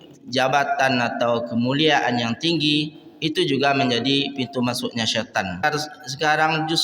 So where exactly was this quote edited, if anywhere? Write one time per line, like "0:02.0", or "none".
0:05.6